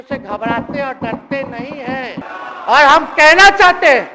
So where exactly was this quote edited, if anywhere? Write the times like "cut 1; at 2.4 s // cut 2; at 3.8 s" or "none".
cut 1; at 2.2 s